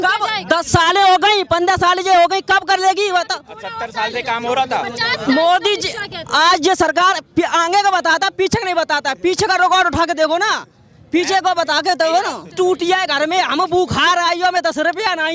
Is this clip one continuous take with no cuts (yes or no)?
no